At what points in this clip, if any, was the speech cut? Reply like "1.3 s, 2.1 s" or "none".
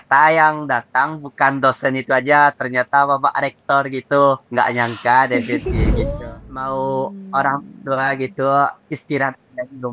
6.0 s